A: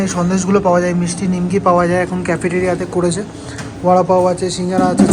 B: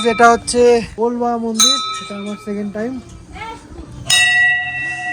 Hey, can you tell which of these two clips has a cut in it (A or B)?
B